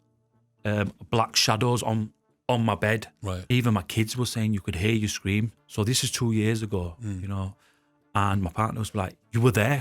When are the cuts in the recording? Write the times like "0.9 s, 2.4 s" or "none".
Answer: 3.3 s